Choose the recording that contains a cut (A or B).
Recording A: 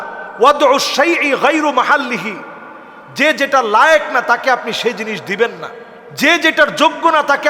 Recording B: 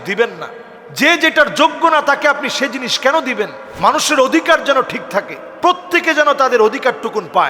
B